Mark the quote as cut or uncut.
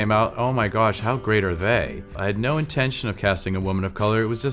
cut